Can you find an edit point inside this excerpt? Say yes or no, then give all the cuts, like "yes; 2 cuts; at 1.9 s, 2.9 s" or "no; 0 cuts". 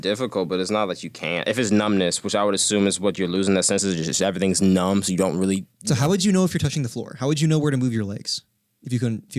no; 0 cuts